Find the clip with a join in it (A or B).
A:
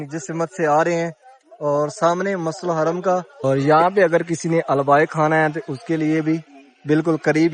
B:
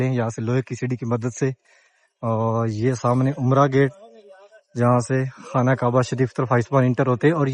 A